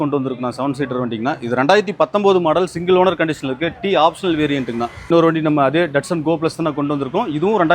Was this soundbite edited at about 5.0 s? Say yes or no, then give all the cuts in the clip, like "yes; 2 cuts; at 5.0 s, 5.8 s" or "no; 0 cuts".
yes; 1 cut; at 5.0 s